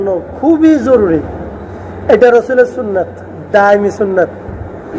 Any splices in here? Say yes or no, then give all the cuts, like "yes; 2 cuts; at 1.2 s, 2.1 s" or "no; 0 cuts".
no; 0 cuts